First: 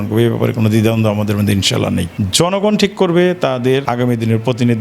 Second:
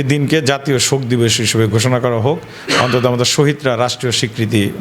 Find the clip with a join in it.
first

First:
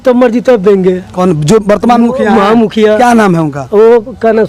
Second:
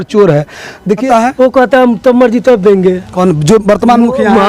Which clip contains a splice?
second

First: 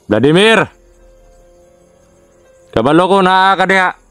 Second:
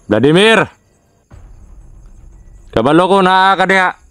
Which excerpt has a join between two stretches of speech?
first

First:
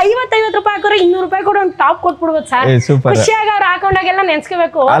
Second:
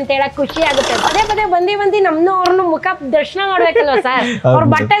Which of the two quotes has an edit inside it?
second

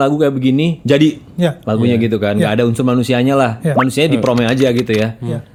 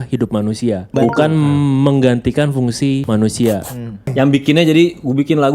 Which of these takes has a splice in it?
second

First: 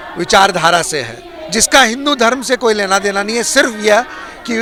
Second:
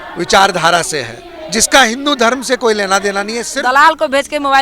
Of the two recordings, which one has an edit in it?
second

